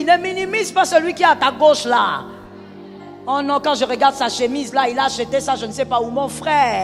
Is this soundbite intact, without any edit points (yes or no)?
yes